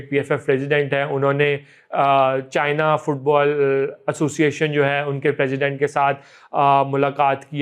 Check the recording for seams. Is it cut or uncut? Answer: uncut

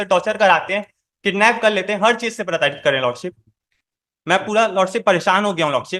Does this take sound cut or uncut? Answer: uncut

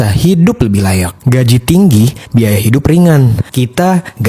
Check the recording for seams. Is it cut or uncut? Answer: uncut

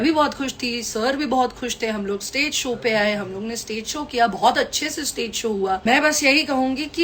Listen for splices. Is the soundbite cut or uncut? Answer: cut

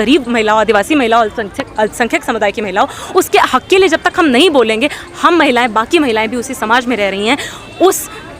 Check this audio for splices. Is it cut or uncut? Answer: uncut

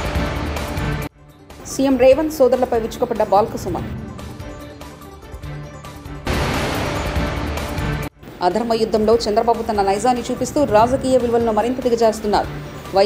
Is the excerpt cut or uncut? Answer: cut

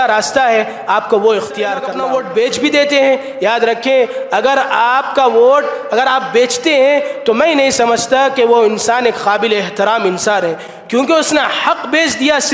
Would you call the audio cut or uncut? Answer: cut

